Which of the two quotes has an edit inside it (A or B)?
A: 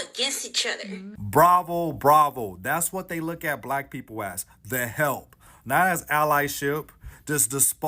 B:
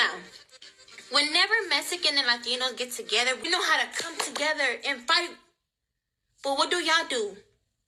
A